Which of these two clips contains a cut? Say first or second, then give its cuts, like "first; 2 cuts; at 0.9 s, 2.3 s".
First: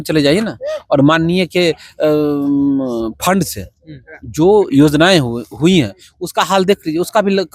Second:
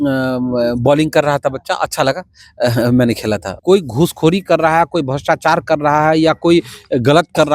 second; 1 cut; at 3.5 s